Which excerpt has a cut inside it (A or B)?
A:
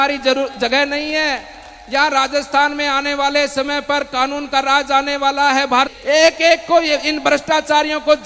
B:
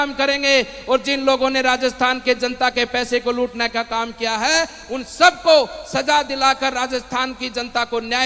A